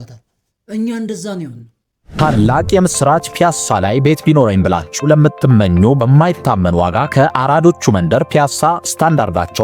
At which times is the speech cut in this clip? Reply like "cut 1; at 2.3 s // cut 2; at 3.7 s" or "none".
cut 1; at 2.0 s